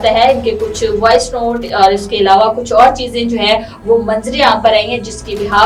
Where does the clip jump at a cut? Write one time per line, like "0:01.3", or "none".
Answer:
none